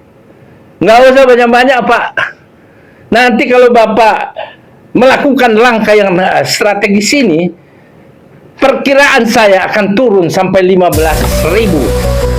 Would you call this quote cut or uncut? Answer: uncut